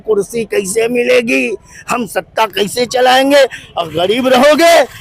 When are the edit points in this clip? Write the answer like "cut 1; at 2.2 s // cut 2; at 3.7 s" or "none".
none